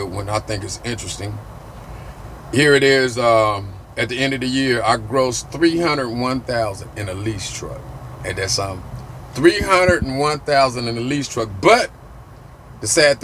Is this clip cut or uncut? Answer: uncut